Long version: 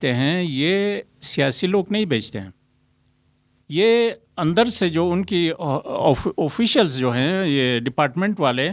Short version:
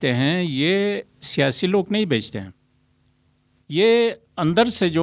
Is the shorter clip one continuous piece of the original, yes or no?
yes